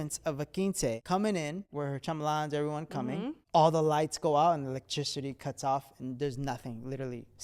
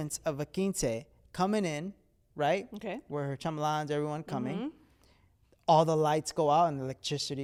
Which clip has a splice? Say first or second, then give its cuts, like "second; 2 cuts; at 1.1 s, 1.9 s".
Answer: first; 3 cuts; at 1.0 s, 1.7 s, 3.4 s